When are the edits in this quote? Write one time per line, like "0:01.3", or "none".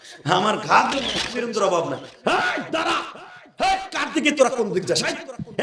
0:00.9